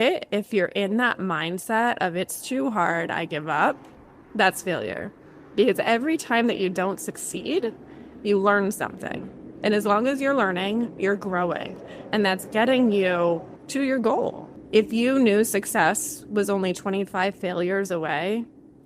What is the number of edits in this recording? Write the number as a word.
two